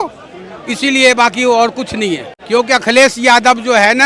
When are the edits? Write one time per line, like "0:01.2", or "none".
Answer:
0:02.3

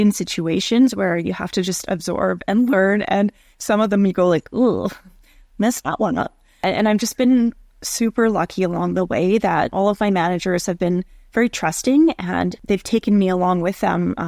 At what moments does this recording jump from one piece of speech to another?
0:06.6

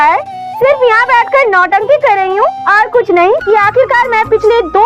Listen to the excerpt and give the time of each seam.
0:03.4

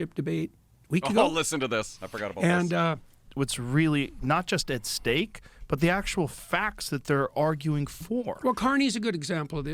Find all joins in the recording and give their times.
0:03.3

